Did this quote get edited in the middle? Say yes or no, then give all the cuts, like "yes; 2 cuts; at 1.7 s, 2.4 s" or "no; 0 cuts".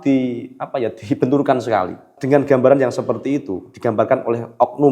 yes; 1 cut; at 2.1 s